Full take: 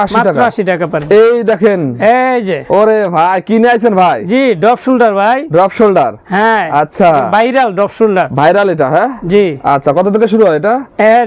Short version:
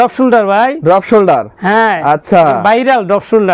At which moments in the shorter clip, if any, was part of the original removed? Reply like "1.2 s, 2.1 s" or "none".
none